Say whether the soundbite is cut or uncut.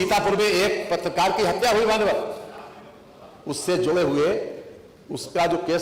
uncut